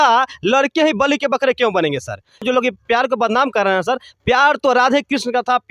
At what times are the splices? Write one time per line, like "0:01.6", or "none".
0:02.4